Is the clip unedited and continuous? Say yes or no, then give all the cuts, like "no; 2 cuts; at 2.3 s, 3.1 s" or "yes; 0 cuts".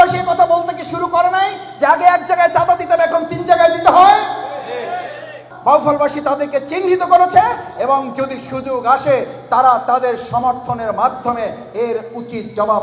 no; 1 cut; at 5.4 s